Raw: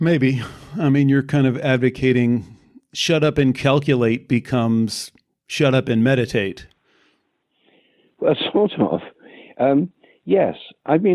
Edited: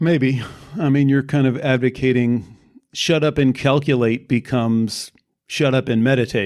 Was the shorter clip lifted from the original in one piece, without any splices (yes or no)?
yes